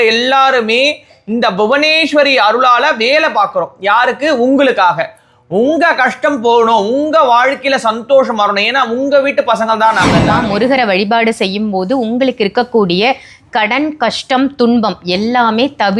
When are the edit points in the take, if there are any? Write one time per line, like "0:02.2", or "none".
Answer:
0:10.3